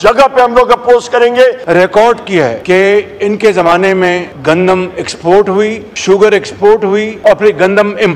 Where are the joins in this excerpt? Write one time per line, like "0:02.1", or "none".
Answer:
0:01.6
0:02.6
0:04.3
0:05.9
0:07.1